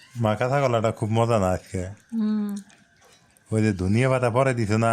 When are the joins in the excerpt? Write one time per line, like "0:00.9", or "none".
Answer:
none